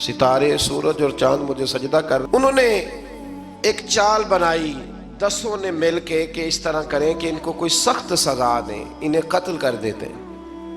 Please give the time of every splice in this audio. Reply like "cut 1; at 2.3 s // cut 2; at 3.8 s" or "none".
cut 1; at 2.2 s